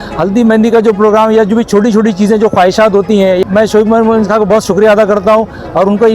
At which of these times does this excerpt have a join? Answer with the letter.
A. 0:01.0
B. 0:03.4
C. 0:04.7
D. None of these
B